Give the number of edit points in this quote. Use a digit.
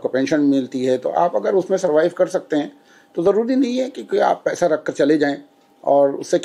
0